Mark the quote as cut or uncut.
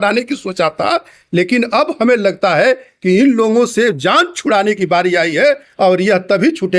uncut